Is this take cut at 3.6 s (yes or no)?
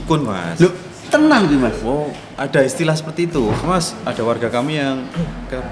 yes